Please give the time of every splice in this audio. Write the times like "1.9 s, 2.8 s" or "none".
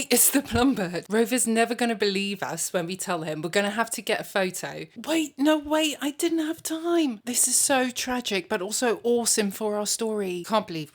none